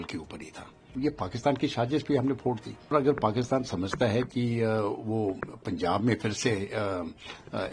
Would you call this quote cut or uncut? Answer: cut